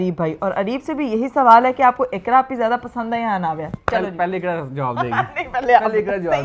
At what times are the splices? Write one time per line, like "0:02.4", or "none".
none